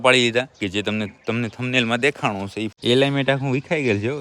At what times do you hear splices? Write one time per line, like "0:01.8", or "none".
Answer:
0:02.7